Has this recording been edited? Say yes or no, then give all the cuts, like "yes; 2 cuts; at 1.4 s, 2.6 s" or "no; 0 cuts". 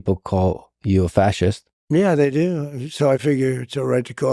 yes; 1 cut; at 1.7 s